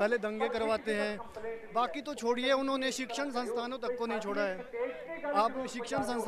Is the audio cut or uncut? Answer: uncut